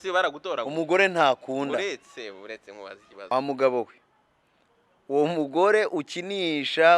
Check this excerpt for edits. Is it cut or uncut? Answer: cut